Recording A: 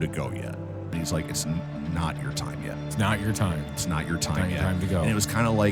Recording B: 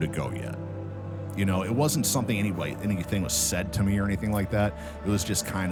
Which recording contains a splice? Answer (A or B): A